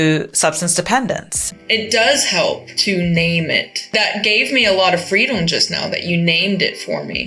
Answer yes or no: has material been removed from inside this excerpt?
yes